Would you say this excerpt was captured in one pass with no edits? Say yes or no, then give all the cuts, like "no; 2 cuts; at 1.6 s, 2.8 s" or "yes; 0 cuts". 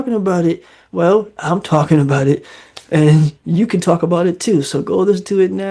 yes; 0 cuts